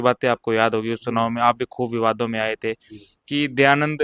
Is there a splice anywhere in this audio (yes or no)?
no